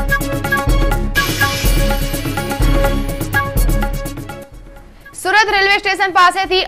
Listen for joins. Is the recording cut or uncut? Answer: uncut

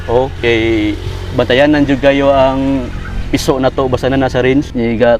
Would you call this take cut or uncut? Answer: uncut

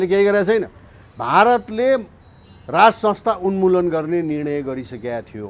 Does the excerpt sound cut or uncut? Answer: uncut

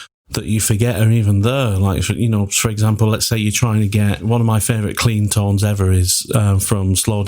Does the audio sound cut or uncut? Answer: cut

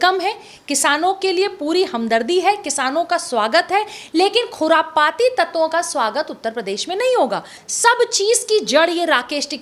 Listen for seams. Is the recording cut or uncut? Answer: cut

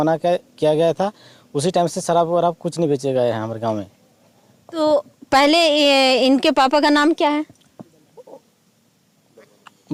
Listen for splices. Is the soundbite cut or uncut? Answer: uncut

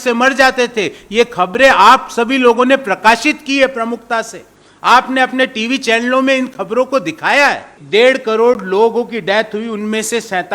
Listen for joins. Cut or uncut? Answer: cut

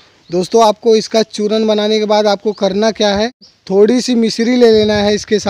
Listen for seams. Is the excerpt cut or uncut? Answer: cut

